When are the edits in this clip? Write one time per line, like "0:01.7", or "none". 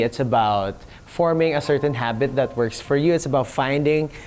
none